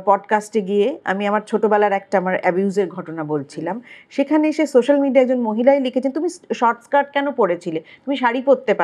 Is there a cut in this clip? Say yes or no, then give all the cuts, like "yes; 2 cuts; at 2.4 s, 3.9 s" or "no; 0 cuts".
no; 0 cuts